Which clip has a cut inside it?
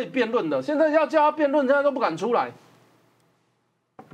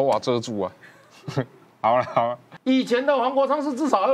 second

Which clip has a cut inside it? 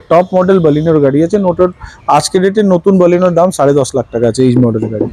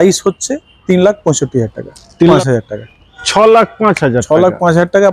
second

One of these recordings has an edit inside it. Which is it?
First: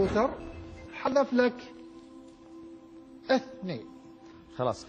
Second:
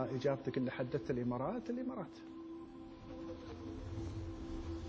second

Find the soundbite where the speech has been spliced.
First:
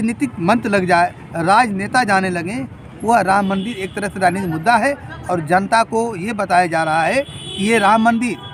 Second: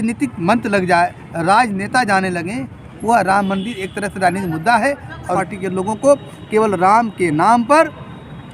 second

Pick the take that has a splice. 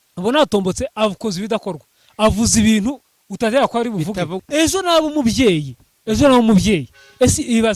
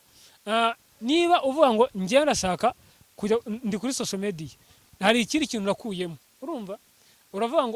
first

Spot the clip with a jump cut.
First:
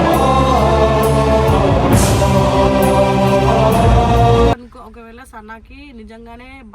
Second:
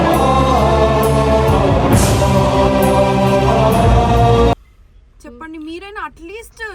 first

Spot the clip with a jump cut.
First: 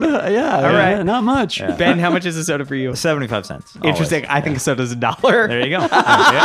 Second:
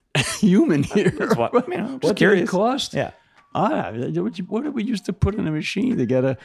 second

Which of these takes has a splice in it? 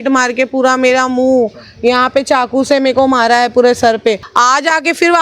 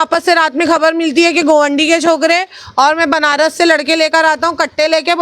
first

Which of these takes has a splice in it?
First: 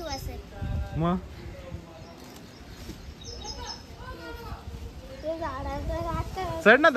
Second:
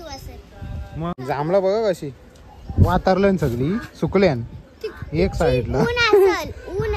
second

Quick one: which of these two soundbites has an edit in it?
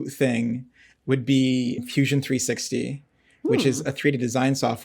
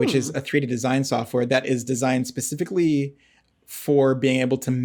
first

